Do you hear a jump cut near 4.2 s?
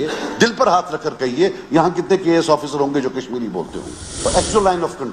yes; 1 cut; at 4.2 s

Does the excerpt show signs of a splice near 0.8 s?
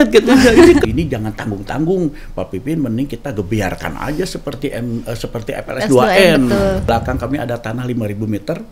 yes; 2 cuts; at 0.8 s, 6.9 s

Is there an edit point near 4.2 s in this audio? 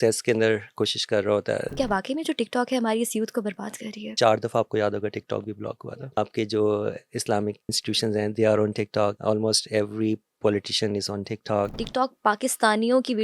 yes; 6 cuts; at 1.7 s, 4.2 s, 5.8 s, 7.7 s, 9.2 s, 11.8 s

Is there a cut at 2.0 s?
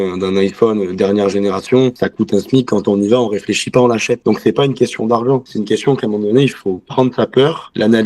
yes; 1 cut; at 2.0 s

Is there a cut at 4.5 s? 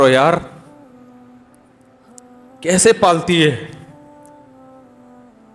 yes; 1 cut; at 4.5 s

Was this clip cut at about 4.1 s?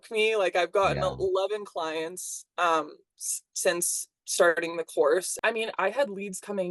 no; 1 cut; at 5.3 s

